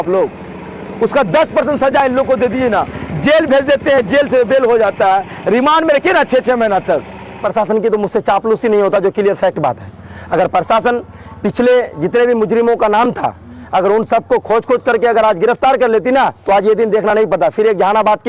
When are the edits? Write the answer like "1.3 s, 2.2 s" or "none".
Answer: 7.4 s